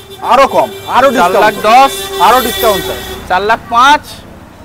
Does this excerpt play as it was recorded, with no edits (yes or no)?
yes